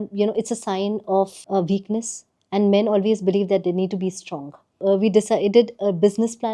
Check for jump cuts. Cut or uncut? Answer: cut